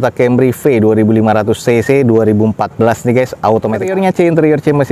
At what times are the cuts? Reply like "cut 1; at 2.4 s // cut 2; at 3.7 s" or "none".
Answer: cut 1; at 3.9 s